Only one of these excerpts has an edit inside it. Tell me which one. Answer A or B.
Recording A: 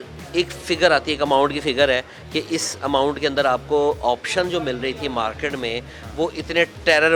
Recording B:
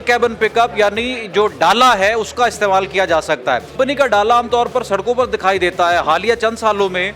B